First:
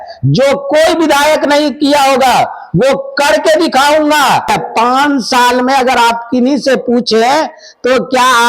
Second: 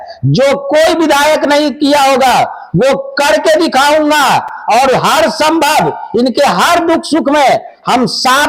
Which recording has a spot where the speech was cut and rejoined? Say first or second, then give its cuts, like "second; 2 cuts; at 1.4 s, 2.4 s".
first; 1 cut; at 4.5 s